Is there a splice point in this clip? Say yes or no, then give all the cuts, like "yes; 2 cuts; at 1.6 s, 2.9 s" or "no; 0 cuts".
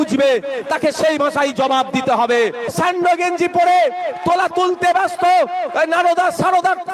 yes; 1 cut; at 2.7 s